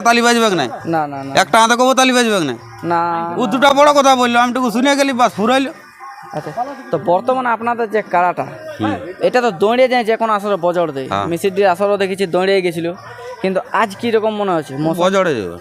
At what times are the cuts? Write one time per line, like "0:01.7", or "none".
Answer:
none